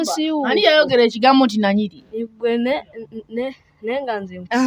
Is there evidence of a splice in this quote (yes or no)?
no